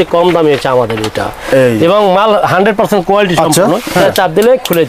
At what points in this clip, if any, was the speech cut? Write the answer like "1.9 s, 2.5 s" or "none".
3.9 s